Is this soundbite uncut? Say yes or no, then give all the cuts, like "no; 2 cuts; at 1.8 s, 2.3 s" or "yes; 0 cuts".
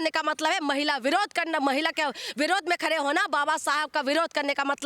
yes; 0 cuts